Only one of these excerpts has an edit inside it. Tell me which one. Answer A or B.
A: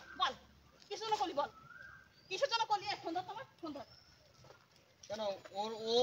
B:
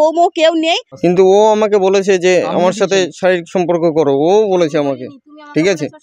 B